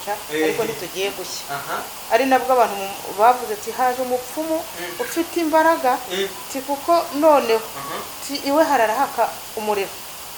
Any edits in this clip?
no; 0 cuts

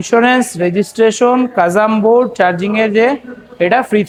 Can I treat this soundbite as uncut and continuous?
yes; 0 cuts

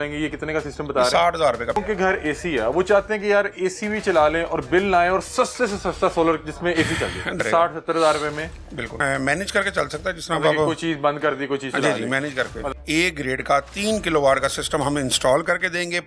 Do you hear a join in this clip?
yes; 4 cuts; at 1.8 s, 7.4 s, 8.8 s, 12.7 s

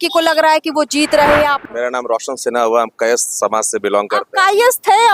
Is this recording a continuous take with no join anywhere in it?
no; 1 cut; at 1.6 s

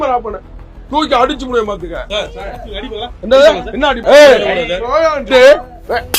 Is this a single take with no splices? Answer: no; 1 cut; at 4.0 s

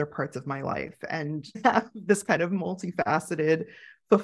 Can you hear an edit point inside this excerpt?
yes; 1 cut; at 1.6 s

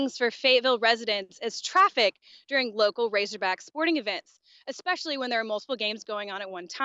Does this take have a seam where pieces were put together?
no; 0 cuts

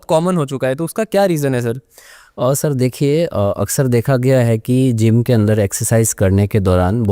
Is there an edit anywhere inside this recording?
no; 0 cuts

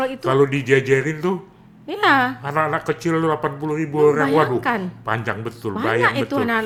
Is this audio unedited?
yes; 0 cuts

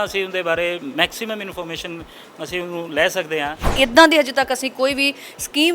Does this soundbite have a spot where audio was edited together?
yes; 1 cut; at 3.6 s

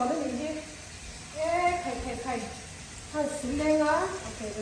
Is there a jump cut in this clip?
no; 0 cuts

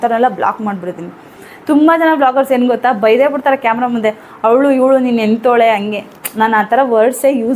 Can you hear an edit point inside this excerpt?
yes; 1 cut; at 1.4 s

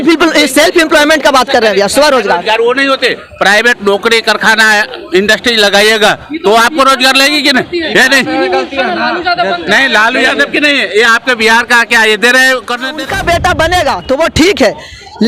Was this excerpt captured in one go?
no; 1 cut; at 13.0 s

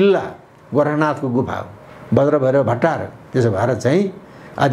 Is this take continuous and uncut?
yes; 0 cuts

